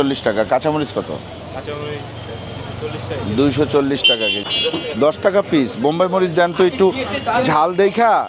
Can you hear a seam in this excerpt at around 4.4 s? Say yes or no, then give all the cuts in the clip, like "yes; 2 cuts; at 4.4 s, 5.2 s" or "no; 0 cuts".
yes; 1 cut; at 4.4 s